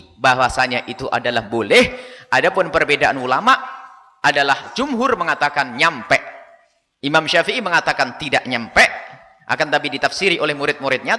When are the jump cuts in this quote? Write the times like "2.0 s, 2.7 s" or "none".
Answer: none